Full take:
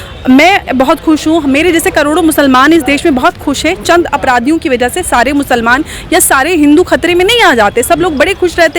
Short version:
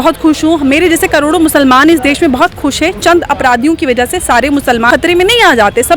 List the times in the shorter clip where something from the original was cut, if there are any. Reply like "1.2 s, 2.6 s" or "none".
4.9 s